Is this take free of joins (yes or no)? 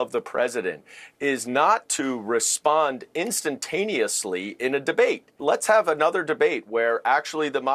no